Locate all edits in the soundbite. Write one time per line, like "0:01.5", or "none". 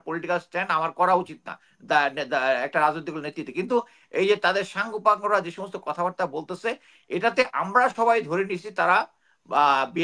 none